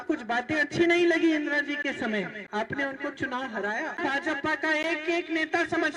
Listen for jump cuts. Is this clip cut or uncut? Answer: cut